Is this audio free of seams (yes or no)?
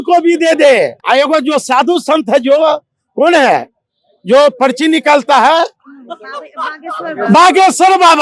no